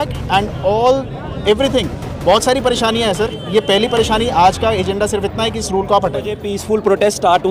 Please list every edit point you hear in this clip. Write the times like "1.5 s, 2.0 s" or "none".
6.5 s